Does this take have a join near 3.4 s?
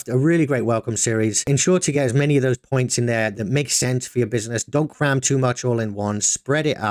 yes; 2 cuts; at 1.4 s, 3.4 s

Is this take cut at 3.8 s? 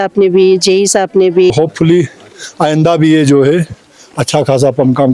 no; 1 cut; at 1.5 s

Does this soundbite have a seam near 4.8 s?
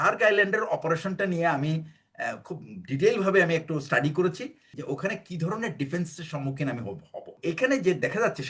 yes; 2 cuts; at 4.8 s, 7.4 s

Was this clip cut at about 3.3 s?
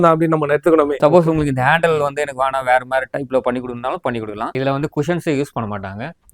no; 2 cuts; at 0.9 s, 4.6 s

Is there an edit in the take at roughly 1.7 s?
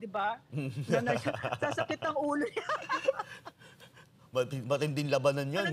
no; 0 cuts

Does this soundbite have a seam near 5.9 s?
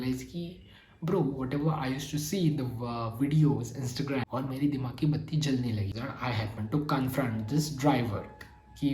yes; 2 cuts; at 4.3 s, 5.9 s

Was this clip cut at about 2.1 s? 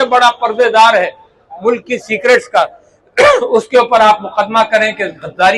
no; 0 cuts

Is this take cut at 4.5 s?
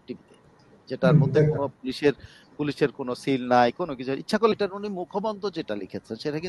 yes; 1 cut; at 4.5 s

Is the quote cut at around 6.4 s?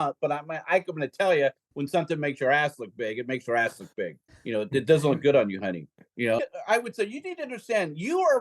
yes; 1 cut; at 6.4 s

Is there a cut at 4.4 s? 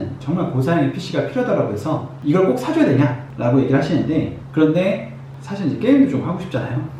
yes; 1 cut; at 4.4 s

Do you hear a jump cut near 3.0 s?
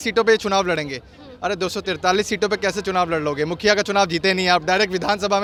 no; 0 cuts

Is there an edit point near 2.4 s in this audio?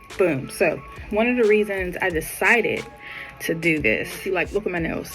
no; 2 cuts; at 0.9 s, 4.2 s

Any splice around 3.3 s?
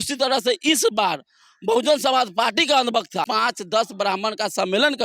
yes; 1 cut; at 3.3 s

